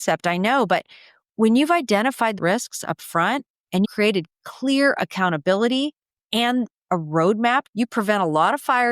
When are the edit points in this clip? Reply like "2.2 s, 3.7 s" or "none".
2.3 s, 3.9 s, 7.7 s